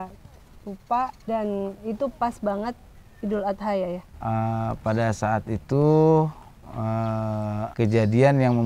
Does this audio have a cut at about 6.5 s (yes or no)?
no